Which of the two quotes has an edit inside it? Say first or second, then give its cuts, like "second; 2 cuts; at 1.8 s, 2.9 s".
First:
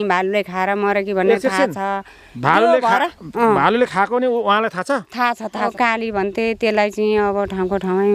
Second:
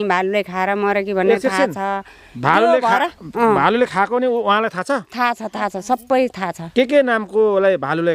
first; 1 cut; at 5.7 s